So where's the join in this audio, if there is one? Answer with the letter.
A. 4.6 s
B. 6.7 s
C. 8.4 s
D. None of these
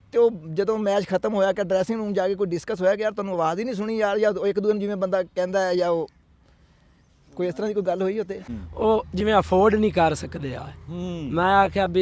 C